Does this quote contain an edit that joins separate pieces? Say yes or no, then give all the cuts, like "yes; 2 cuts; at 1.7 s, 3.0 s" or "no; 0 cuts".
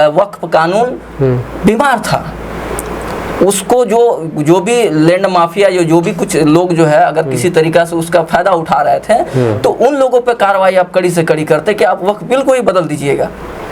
no; 0 cuts